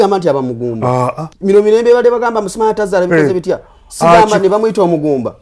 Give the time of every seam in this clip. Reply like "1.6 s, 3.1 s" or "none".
1.3 s